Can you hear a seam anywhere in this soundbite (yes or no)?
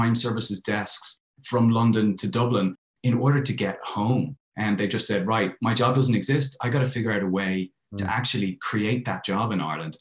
no